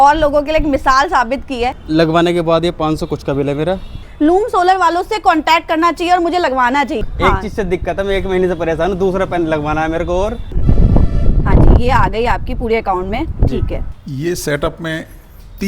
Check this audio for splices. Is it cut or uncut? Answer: cut